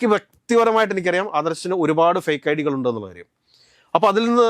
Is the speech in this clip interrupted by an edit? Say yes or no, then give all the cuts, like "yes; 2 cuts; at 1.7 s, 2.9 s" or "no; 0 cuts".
no; 0 cuts